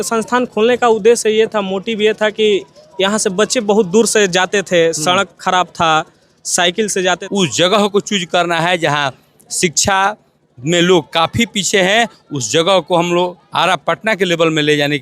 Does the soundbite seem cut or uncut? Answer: cut